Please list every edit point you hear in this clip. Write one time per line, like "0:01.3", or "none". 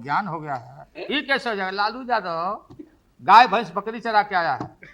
0:01.0

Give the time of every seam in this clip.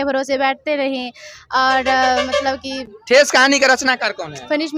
none

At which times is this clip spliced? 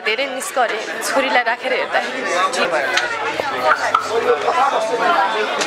0:02.7

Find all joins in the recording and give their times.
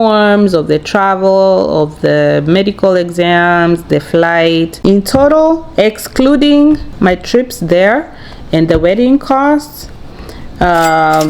0:04.7
0:06.9

